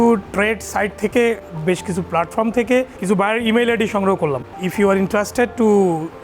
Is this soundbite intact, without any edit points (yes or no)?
no